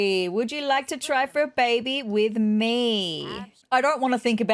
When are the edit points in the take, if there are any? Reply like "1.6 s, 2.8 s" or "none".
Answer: 3.6 s